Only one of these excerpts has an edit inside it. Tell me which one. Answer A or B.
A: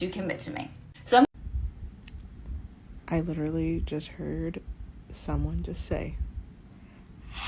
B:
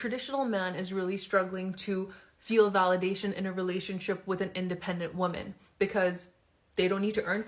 A